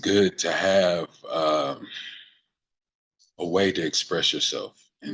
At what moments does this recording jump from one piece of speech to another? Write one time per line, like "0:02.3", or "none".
none

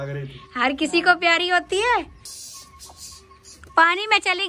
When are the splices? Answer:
0:02.2

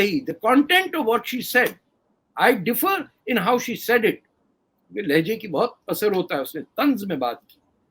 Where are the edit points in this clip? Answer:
none

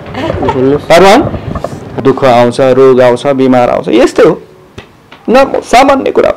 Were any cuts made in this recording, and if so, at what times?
0:01.9

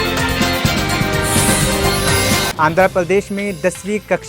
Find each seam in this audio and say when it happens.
0:02.5

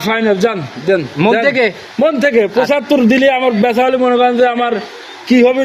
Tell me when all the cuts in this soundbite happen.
none

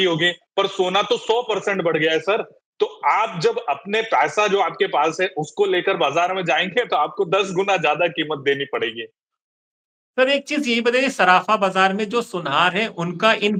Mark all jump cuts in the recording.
none

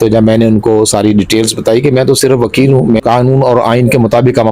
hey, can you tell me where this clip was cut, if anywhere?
0:03.0

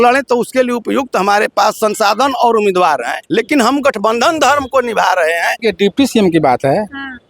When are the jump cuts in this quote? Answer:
0:03.2
0:05.6

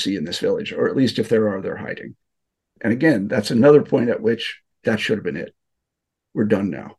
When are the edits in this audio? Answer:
0:04.7

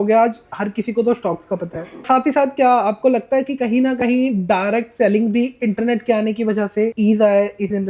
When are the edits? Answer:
0:02.0
0:06.9

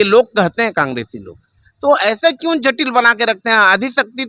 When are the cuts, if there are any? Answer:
none

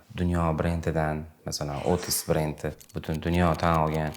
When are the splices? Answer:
0:01.4

